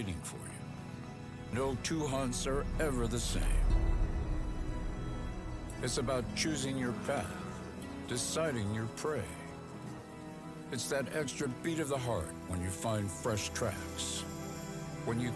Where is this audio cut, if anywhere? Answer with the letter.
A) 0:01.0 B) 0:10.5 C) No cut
C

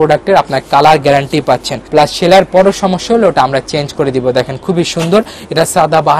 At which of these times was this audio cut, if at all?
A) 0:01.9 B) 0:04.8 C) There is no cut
A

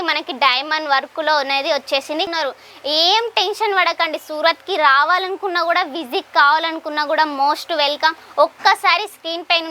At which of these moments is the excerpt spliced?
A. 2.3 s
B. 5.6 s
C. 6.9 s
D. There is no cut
A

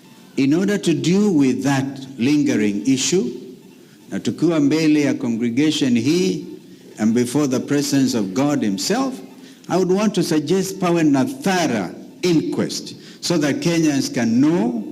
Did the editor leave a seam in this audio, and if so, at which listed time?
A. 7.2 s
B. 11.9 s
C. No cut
C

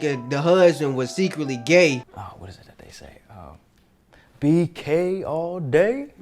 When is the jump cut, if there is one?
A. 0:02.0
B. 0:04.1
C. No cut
A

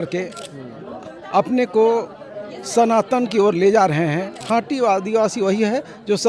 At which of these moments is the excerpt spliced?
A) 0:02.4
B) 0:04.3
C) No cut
B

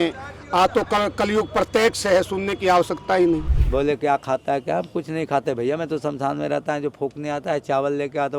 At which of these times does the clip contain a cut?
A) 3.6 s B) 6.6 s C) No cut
A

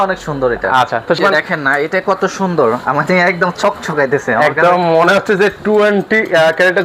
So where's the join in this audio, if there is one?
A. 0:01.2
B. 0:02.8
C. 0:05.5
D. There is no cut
A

